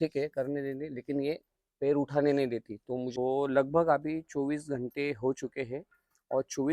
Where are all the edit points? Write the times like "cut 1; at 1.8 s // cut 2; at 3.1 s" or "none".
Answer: cut 1; at 3.1 s

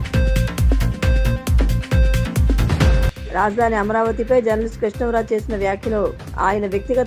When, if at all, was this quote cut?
none

